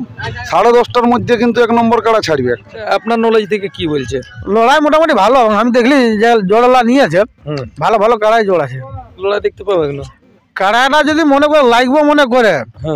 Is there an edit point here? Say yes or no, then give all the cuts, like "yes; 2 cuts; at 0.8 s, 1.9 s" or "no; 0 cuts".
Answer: yes; 2 cuts; at 2.9 s, 9.1 s